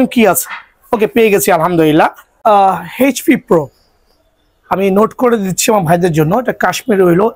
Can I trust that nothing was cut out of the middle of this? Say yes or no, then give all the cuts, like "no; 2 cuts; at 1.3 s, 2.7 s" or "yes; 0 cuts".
no; 1 cut; at 2.4 s